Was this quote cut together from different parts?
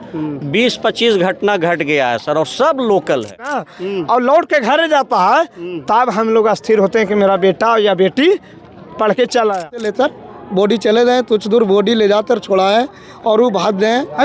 yes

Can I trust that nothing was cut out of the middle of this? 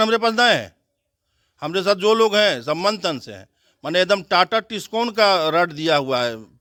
yes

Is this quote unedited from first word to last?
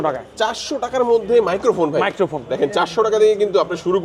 yes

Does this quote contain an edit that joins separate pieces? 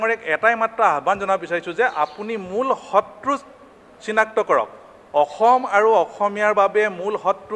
no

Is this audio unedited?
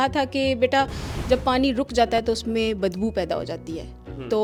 yes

